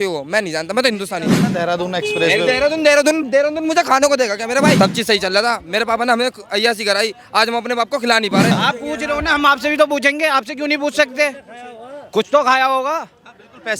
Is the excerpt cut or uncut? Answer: cut